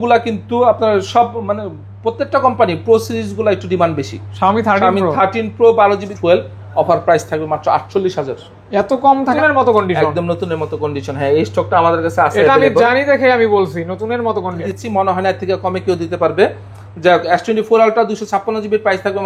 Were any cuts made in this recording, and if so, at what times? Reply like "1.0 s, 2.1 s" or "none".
6.1 s, 9.4 s, 14.6 s